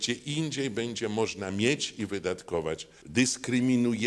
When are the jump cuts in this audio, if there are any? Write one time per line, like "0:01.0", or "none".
0:02.9

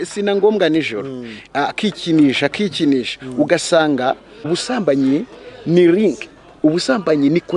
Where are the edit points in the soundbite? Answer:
0:04.3

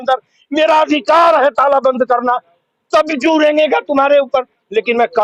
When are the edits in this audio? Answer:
none

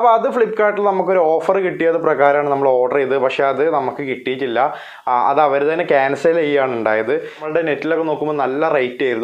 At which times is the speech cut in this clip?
0:07.4

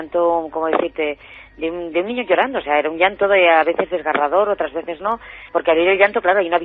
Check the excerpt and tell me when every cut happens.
none

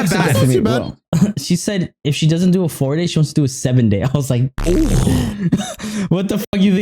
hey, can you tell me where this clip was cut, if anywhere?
0:01.0

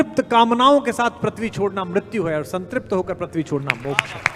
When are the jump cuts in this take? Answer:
none

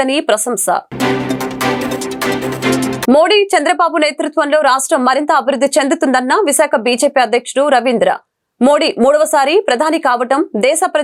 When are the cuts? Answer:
none

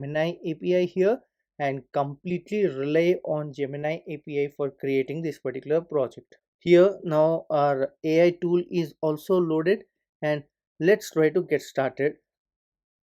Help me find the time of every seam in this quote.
none

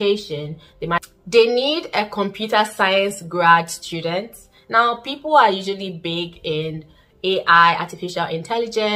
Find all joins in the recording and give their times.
0:01.0

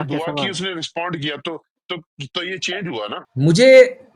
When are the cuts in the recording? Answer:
0:03.3

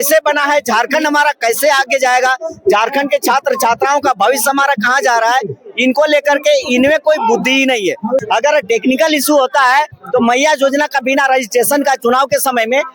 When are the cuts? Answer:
0:08.2

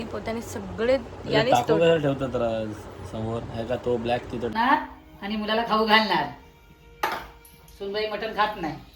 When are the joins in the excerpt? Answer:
0:04.5

